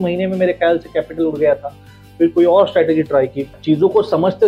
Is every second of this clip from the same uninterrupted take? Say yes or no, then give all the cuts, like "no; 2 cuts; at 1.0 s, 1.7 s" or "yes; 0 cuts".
yes; 0 cuts